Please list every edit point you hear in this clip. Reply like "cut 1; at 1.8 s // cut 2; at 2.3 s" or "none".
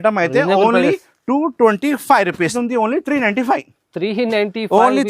cut 1; at 2.5 s